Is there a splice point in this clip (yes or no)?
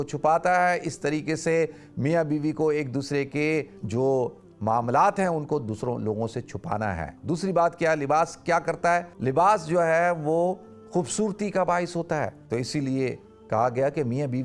yes